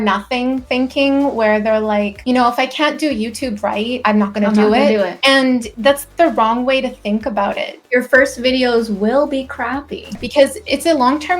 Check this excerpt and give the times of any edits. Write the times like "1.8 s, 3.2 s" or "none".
7.8 s